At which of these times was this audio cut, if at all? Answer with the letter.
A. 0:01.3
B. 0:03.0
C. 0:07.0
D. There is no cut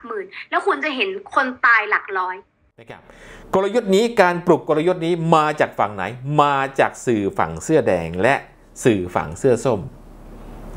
B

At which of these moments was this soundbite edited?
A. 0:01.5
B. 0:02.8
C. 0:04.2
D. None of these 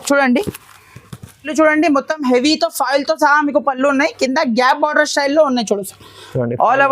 A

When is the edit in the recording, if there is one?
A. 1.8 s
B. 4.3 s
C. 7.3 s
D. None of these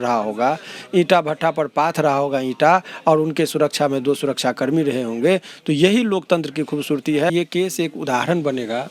C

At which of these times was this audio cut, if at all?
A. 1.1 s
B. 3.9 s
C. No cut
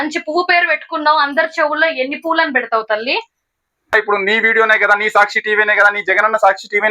B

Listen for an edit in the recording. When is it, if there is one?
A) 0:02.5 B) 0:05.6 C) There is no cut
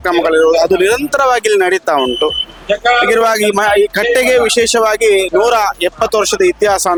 C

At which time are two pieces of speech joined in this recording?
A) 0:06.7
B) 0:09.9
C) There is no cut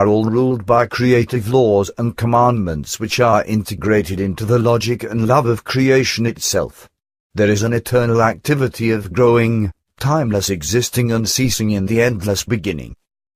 C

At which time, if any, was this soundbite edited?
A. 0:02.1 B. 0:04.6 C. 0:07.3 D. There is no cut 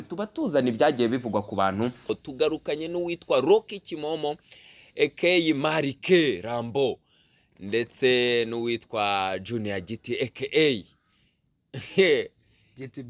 A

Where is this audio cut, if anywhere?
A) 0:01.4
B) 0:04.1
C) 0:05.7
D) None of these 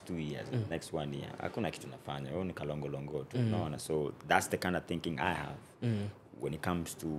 D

